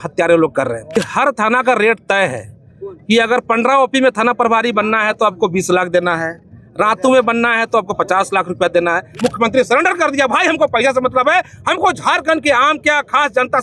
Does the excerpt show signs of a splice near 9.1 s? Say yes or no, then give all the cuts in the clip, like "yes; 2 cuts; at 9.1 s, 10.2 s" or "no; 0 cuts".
yes; 2 cuts; at 1.0 s, 9.1 s